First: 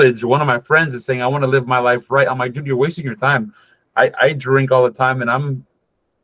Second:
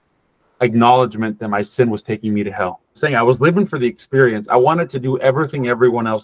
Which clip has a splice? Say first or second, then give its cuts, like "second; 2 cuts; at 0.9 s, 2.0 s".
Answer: second; 1 cut; at 3.0 s